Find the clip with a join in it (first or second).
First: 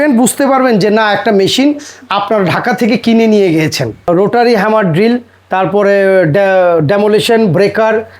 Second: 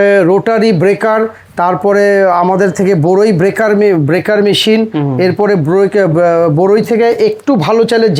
first